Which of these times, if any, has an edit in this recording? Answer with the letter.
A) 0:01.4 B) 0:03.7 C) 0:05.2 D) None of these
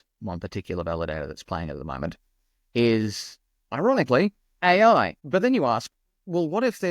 C